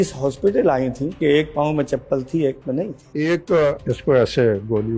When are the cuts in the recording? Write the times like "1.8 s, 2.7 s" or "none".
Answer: 1.2 s, 3.0 s, 3.8 s